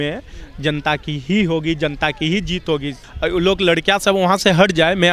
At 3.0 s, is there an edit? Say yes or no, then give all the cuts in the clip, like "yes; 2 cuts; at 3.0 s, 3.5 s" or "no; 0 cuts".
yes; 1 cut; at 3.0 s